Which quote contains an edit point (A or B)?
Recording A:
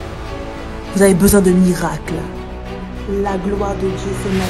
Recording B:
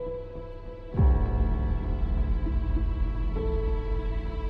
A